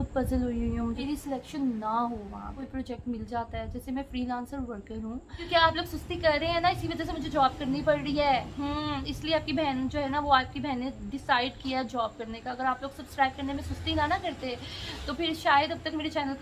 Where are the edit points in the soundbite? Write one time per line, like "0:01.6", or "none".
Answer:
0:01.0
0:02.6
0:05.4

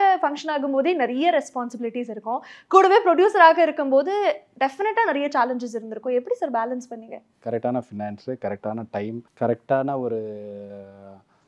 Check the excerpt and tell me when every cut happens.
0:07.3
0:09.2

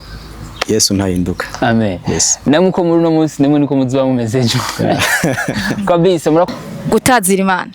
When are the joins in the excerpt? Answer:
0:06.5

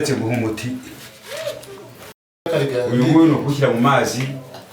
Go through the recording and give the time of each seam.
0:02.5

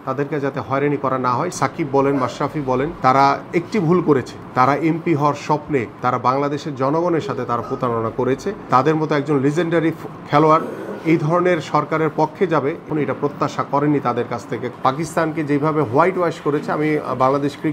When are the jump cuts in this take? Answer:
0:01.5
0:02.9
0:04.4
0:05.9
0:08.6
0:12.9
0:14.7

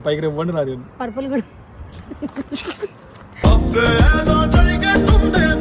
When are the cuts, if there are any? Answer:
none

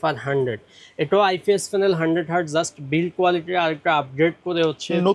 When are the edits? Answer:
none

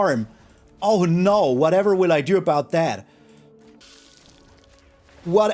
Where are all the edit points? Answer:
0:03.8

